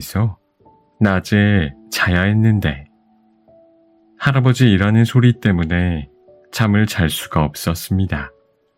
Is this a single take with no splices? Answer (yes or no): no